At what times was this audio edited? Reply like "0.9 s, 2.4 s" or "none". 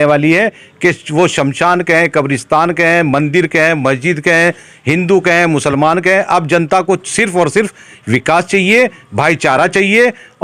none